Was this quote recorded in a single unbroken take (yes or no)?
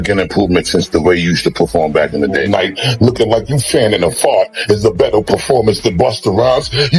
yes